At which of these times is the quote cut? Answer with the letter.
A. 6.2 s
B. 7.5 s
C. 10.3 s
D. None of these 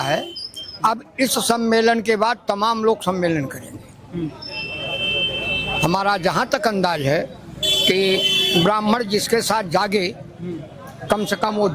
D